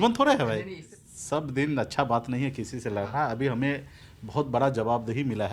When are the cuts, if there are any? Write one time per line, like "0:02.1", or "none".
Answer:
0:00.9